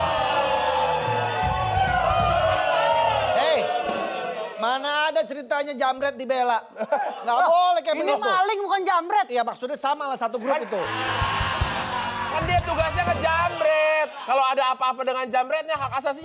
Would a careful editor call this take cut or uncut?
uncut